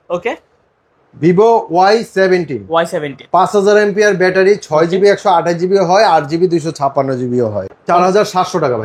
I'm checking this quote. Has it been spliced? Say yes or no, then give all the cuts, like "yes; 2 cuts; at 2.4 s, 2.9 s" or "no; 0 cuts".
yes; 1 cut; at 7.7 s